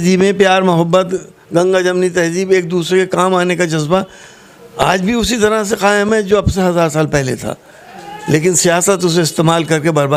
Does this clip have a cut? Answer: no; 0 cuts

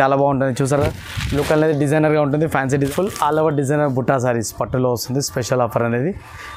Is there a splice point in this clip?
yes; 1 cut; at 2.9 s

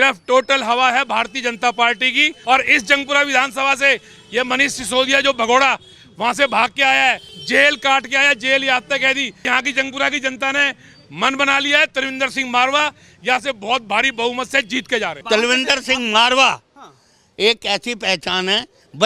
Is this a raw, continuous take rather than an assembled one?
no; 4 cuts; at 2.3 s, 7.3 s, 9.4 s, 15.2 s

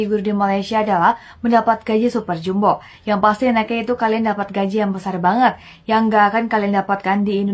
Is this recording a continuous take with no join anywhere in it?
yes; 0 cuts

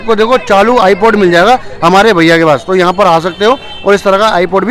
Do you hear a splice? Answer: no; 0 cuts

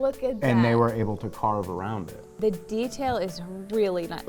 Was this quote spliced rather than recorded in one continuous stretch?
yes; 1 cut; at 2.4 s

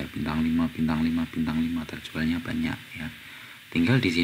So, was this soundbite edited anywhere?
no; 0 cuts

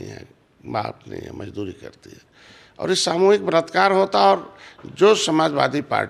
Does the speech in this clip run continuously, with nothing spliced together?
yes; 0 cuts

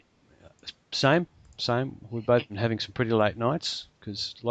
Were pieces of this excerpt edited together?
yes; 1 cut; at 3.2 s

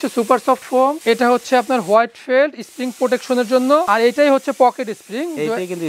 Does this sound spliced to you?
no; 0 cuts

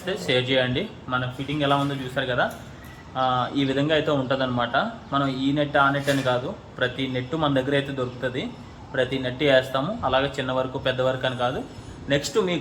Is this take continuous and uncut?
yes; 0 cuts

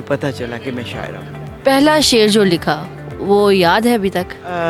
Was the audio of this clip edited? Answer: no; 0 cuts

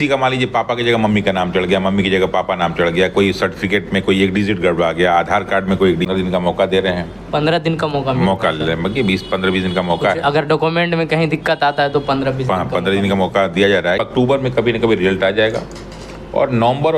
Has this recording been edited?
yes; 2 cuts; at 6.1 s, 14.0 s

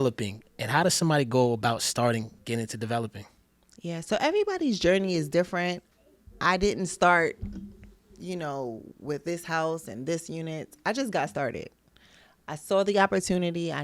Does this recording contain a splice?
no; 0 cuts

